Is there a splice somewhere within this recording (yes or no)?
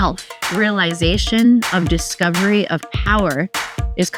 no